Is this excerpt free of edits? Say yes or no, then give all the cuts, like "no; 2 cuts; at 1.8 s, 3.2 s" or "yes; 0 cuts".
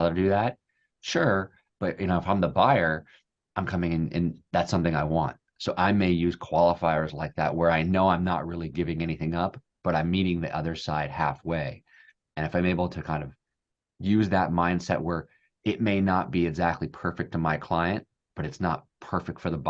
yes; 0 cuts